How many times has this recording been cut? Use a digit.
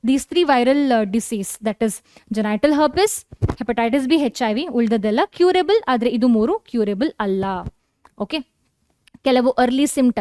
0